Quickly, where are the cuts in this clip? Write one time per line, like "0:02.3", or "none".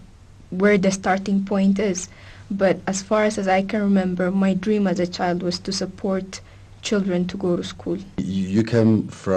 0:07.5